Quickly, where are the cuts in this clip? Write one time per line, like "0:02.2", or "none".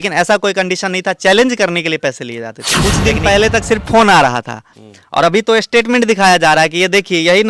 0:02.6